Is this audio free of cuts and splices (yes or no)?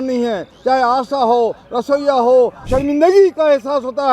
no